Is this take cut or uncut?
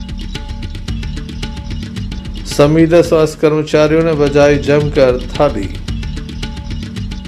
cut